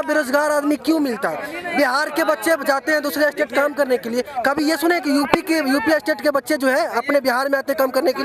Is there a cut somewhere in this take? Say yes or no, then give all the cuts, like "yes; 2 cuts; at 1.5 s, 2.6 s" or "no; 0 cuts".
no; 0 cuts